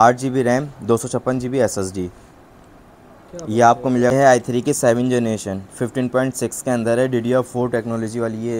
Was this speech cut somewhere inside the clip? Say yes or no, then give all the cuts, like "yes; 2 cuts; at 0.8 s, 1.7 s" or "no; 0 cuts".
yes; 1 cut; at 4.1 s